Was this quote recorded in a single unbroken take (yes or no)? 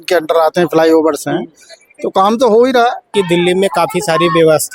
no